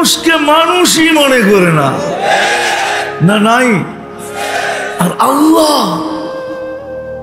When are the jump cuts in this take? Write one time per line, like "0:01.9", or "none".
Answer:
none

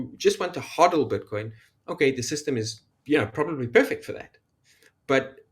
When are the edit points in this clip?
0:02.9

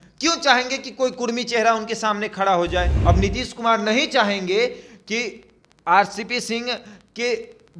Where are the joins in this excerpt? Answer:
0:02.9

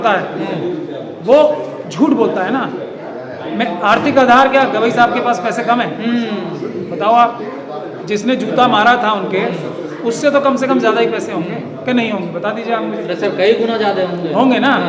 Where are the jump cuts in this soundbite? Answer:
none

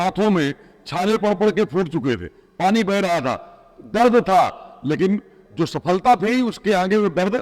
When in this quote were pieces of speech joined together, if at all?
none

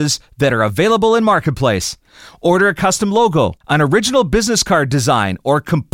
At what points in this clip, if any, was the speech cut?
0:03.6

